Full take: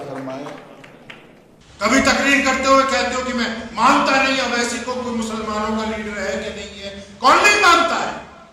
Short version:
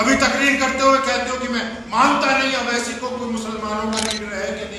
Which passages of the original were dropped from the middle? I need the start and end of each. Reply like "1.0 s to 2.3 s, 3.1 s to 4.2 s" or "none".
none